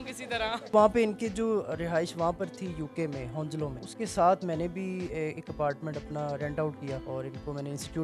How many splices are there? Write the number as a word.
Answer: three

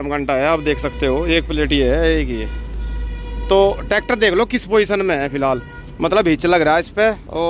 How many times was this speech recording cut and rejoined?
zero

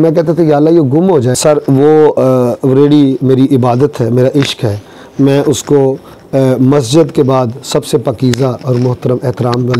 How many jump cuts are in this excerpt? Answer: one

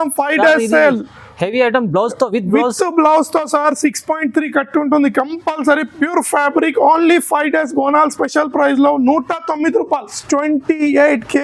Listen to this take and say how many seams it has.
one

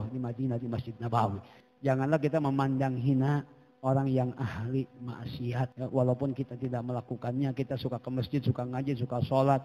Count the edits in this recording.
two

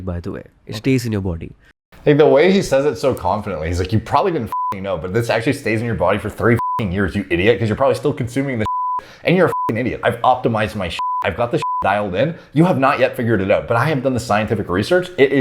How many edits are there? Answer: one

